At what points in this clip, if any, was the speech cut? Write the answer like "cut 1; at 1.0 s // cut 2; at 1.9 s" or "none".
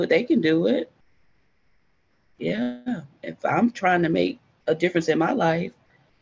none